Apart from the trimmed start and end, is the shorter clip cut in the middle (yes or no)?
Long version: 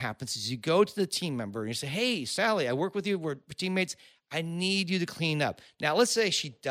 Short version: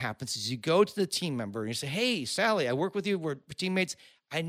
no